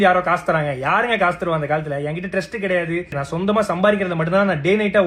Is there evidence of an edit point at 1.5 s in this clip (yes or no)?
no